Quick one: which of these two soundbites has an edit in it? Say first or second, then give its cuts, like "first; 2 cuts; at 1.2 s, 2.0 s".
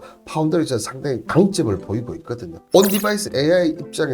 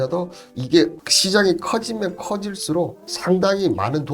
first; 1 cut; at 2.6 s